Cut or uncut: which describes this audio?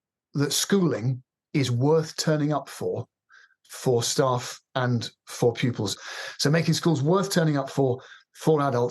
cut